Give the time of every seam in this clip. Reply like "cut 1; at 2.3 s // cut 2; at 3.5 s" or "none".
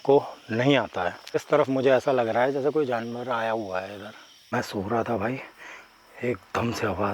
cut 1; at 1.4 s // cut 2; at 4.5 s